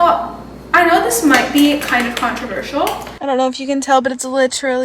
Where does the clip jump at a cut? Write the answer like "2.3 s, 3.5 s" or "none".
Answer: 3.1 s